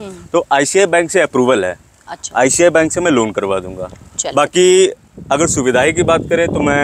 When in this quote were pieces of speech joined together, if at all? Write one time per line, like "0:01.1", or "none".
none

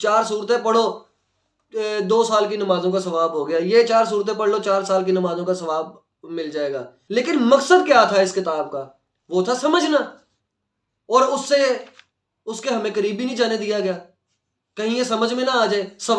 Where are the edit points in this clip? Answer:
0:06.9

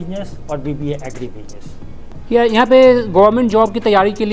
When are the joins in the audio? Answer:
0:02.1

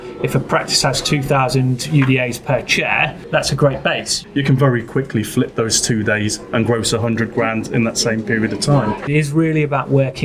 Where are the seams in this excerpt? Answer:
0:03.2
0:04.2
0:09.1

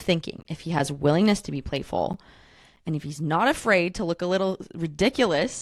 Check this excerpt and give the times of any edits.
none

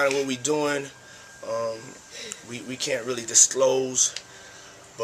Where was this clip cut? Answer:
none

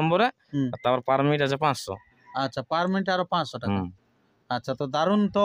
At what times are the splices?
none

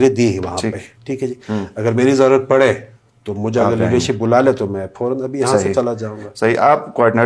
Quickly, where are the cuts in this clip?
none

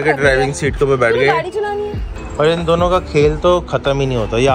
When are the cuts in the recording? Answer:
0:02.0

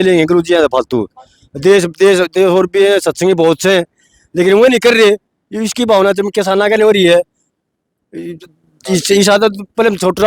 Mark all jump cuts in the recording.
none

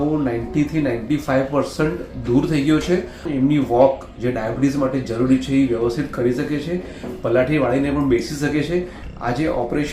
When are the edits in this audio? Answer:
0:03.2
0:09.0

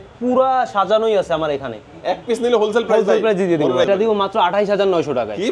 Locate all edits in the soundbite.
0:03.9

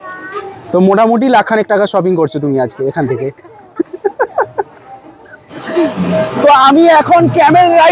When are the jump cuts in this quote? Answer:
0:05.9

